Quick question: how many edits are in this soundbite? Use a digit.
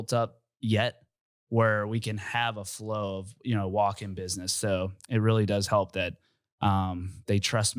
0